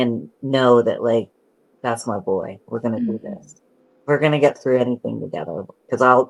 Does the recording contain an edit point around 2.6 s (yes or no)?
no